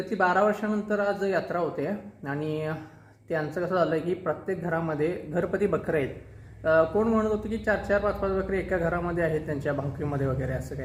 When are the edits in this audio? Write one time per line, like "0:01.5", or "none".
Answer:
none